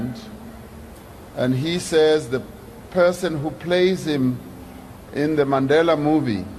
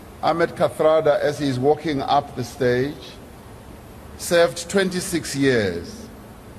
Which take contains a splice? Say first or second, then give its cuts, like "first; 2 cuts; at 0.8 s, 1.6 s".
second; 1 cut; at 2.9 s